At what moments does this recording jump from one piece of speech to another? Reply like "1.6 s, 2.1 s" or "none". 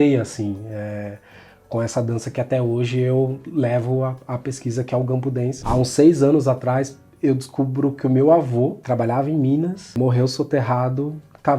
5.6 s, 9.8 s